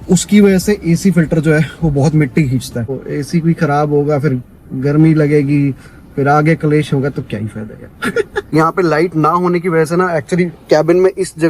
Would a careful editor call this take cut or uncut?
cut